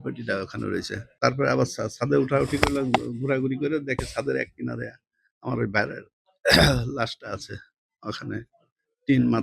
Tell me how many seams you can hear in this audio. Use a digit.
1